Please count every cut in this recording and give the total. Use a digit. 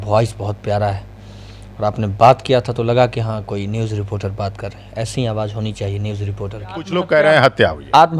1